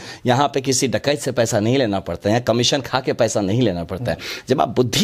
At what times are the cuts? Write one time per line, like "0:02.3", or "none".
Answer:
none